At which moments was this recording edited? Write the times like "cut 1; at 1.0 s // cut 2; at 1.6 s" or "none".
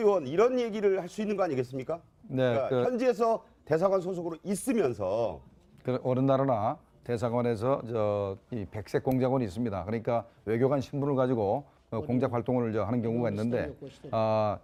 none